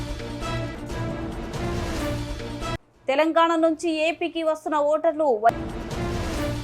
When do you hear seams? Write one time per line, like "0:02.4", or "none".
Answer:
0:02.5